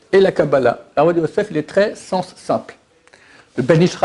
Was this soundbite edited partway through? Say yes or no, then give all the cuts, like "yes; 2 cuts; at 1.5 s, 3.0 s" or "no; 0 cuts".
no; 0 cuts